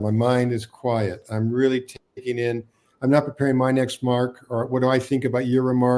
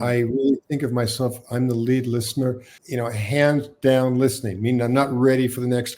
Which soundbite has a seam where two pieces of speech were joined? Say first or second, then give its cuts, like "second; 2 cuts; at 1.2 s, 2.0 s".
second; 1 cut; at 2.7 s